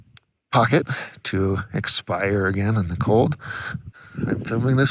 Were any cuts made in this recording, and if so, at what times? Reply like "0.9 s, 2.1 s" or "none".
3.9 s

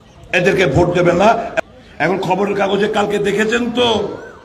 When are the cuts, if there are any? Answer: 1.5 s

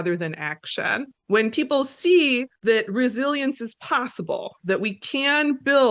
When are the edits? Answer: 1.1 s, 2.5 s

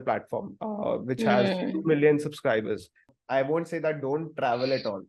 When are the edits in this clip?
3.2 s

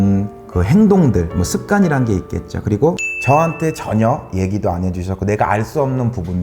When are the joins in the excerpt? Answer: 3.1 s

